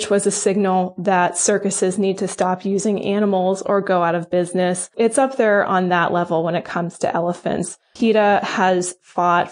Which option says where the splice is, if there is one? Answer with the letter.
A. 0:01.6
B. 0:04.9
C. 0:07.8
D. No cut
B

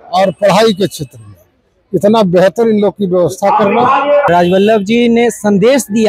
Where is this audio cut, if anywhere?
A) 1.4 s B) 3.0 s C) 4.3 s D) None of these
C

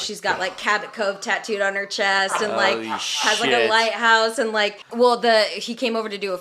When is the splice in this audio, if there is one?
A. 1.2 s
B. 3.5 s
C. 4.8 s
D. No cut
C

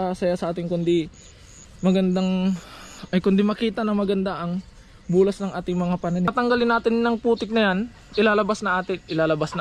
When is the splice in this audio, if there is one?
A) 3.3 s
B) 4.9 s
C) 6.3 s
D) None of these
C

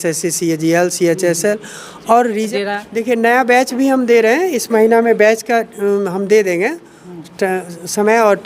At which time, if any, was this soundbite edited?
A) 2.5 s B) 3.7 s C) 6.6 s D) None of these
A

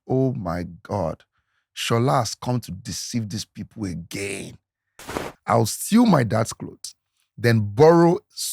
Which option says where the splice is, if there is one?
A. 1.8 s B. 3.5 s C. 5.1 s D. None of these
C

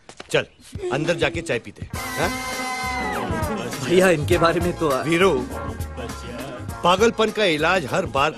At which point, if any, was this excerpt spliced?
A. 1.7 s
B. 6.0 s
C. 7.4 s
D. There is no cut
B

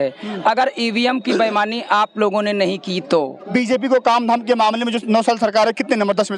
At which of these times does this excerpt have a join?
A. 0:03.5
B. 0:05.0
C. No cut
A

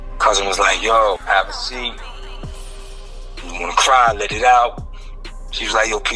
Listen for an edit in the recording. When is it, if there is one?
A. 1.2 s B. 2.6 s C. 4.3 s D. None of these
A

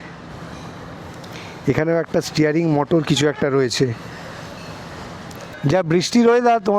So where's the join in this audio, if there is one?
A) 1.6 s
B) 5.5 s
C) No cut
B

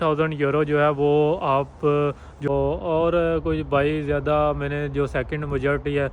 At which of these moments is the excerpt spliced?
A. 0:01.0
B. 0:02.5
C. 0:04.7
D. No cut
B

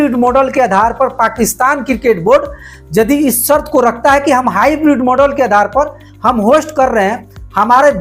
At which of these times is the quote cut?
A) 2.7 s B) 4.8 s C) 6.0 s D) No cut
C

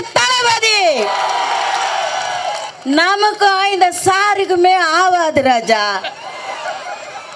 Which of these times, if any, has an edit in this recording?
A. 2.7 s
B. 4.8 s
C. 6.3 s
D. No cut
A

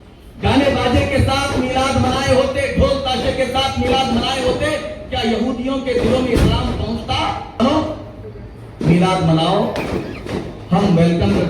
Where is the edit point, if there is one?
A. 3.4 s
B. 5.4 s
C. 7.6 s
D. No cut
C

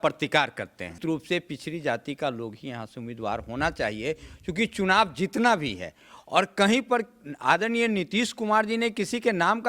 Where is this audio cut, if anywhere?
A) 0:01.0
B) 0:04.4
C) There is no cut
A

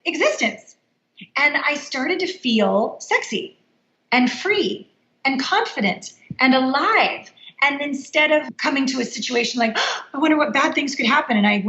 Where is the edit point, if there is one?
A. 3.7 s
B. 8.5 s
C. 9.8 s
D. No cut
B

